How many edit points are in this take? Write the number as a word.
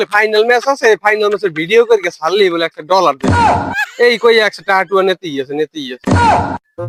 zero